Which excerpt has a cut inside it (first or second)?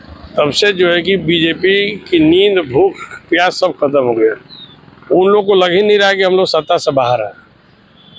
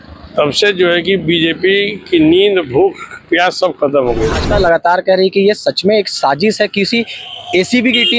second